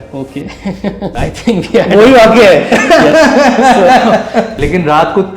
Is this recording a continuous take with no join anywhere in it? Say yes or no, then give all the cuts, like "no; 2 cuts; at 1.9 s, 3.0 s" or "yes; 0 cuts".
no; 2 cuts; at 1.2 s, 4.5 s